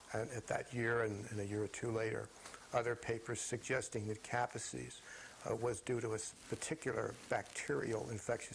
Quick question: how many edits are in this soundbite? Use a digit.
1